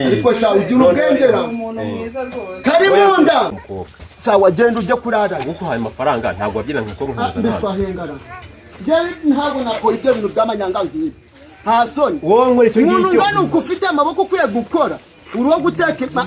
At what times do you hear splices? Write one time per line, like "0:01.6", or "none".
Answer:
0:03.6